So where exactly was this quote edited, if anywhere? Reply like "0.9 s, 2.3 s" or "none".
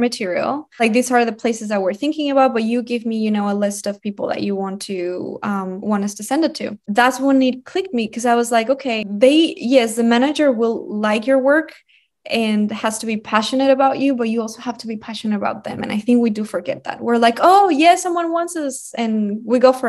0.8 s, 6.8 s, 9.1 s